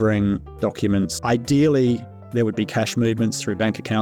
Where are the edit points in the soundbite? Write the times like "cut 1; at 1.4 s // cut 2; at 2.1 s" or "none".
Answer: cut 1; at 1.2 s